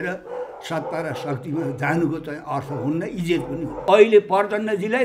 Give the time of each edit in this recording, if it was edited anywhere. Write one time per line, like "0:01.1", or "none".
0:03.8